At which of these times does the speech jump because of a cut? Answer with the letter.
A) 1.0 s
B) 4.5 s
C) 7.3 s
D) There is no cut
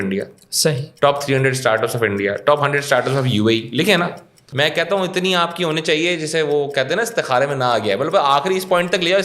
B